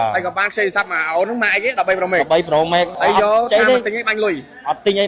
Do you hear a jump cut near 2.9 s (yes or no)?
yes